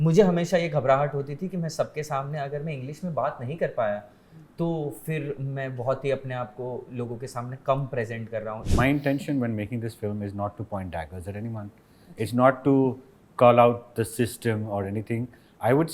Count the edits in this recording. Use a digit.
1